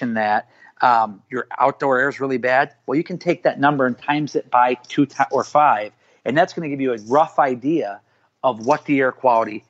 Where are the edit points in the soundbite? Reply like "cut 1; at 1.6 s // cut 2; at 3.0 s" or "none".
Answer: none